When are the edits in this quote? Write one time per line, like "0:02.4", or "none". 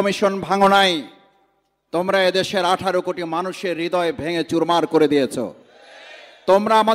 none